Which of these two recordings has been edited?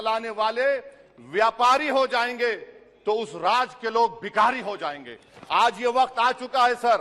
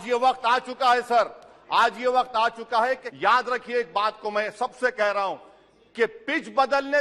second; 1 cut; at 3.1 s

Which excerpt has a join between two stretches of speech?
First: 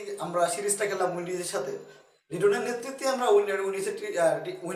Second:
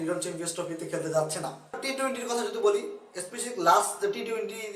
second; 1 cut; at 1.8 s

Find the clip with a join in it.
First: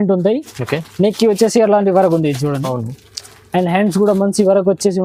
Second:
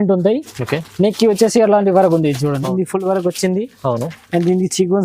second; 1 cut; at 2.7 s

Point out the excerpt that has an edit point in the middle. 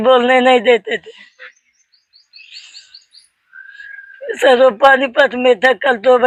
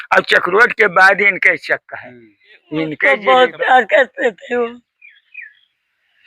second; 1 cut; at 3.0 s

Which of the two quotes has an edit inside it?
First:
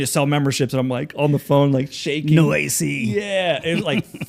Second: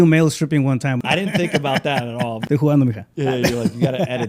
second; 2 cuts; at 1.0 s, 2.4 s

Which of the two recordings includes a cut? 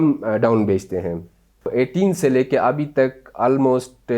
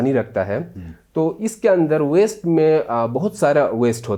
first; 1 cut; at 1.7 s

